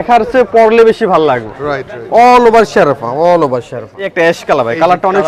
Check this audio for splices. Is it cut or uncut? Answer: cut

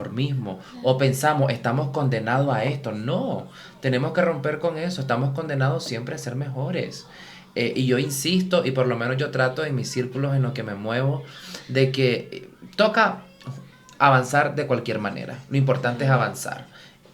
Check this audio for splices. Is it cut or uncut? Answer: uncut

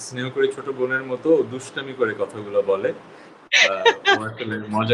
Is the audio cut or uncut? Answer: uncut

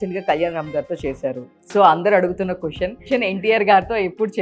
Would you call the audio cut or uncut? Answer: cut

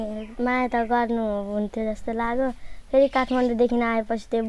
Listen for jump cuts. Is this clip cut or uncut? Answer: uncut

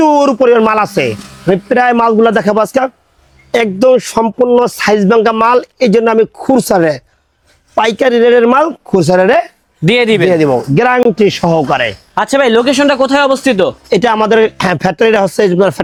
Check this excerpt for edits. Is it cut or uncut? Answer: uncut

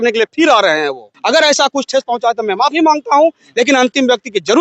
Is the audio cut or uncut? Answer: cut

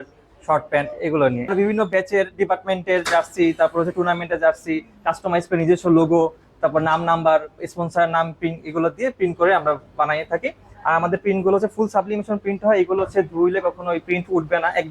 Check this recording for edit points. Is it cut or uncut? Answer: cut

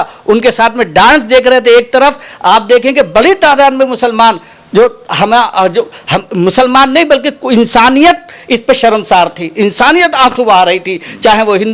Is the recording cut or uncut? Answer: uncut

